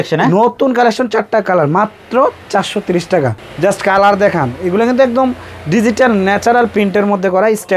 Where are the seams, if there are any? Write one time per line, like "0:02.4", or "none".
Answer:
0:03.4